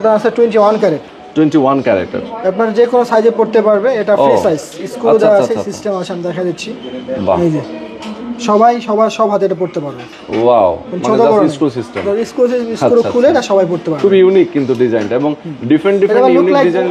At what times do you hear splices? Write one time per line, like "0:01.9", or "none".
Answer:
none